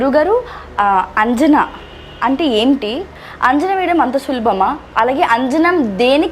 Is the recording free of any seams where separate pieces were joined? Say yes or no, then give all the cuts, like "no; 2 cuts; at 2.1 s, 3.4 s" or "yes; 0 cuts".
no; 1 cut; at 3.1 s